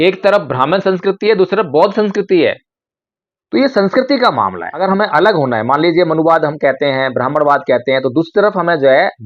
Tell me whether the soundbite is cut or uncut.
cut